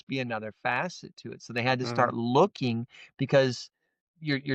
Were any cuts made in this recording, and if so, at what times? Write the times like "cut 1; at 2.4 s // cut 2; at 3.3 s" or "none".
none